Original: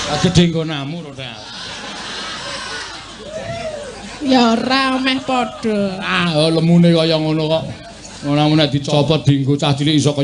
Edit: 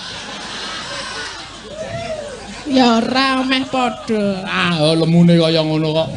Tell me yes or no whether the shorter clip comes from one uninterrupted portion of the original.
yes